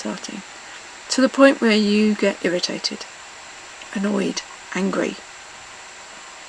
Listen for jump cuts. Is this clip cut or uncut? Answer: uncut